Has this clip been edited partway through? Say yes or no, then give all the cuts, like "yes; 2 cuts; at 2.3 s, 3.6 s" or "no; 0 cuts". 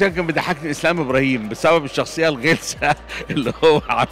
no; 0 cuts